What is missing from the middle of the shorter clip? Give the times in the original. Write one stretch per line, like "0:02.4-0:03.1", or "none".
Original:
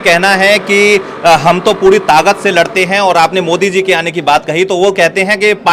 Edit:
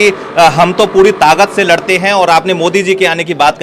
none